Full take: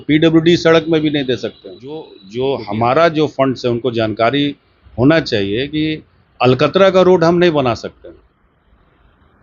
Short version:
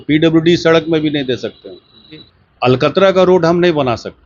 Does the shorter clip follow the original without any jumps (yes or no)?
no